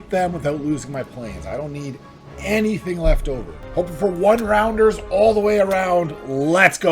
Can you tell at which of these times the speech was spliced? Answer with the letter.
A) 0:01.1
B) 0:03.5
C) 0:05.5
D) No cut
B